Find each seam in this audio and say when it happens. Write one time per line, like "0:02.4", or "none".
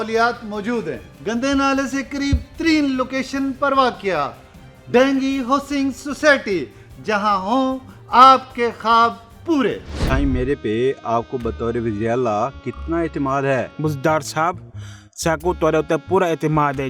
0:09.9